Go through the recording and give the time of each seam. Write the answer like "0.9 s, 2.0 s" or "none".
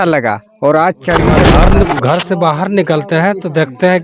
1.4 s